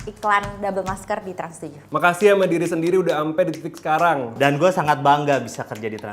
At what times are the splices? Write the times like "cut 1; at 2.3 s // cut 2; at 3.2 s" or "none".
cut 1; at 1.8 s // cut 2; at 4.3 s